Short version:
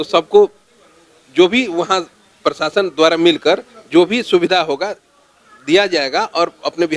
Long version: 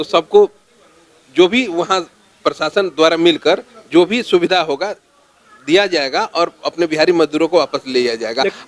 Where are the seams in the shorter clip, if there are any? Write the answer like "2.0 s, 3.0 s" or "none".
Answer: none